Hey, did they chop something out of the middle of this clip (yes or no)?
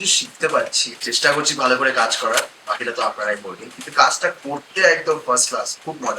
yes